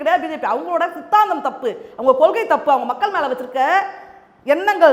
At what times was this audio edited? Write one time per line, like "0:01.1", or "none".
none